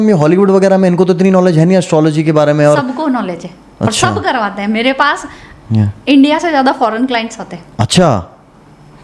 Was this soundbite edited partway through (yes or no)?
no